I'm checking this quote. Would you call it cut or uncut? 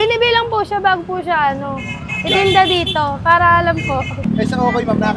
uncut